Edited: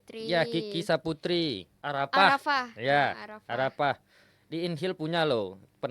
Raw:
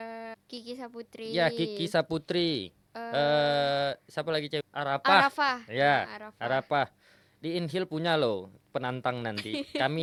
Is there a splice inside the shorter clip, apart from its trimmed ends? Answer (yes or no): yes